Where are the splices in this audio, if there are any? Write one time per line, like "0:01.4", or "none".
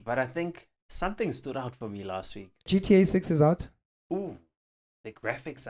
0:02.7